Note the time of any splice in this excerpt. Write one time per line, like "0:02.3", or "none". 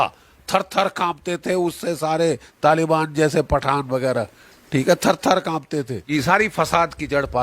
0:06.1